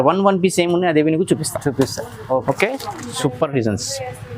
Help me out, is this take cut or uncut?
cut